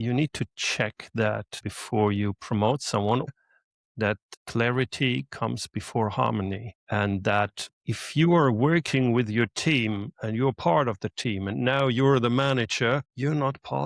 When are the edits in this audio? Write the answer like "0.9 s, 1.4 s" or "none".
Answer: 1.6 s, 3.3 s